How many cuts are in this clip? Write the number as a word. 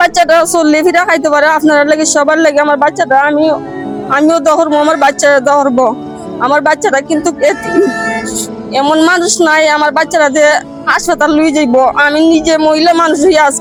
zero